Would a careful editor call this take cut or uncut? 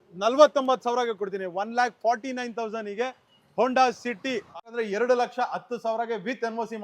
cut